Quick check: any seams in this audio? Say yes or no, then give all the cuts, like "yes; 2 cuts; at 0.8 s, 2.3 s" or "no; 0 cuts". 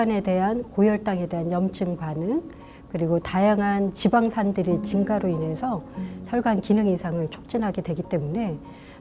no; 0 cuts